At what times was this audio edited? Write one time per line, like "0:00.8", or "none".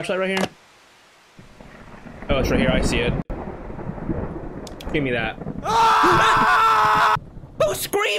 none